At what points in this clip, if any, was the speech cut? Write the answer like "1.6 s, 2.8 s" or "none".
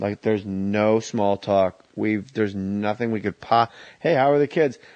none